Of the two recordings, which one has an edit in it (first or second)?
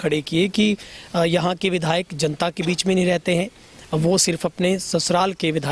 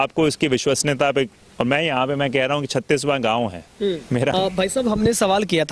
second